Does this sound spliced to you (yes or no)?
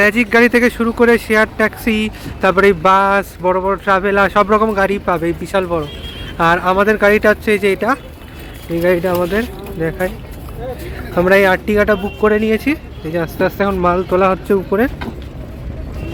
no